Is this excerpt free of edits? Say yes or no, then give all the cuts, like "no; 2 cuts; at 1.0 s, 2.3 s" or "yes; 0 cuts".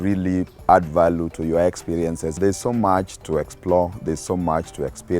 no; 1 cut; at 2.4 s